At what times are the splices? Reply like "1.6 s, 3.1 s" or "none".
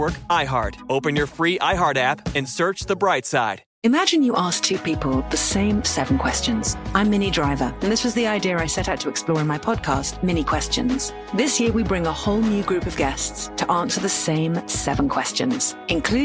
3.6 s